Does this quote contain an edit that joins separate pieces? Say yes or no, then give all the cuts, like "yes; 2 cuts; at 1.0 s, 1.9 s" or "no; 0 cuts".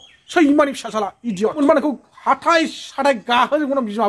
yes; 1 cut; at 1.5 s